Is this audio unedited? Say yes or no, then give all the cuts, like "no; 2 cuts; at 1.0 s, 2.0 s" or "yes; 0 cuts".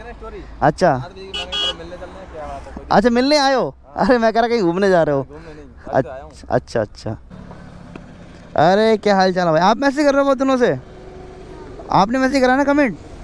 no; 1 cut; at 7.3 s